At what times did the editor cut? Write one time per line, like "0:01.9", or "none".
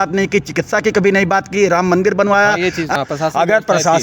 0:02.9